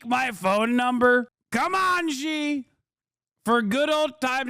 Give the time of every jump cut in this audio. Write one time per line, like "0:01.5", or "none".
0:01.4